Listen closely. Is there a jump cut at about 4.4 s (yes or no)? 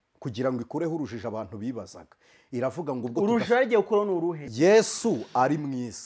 yes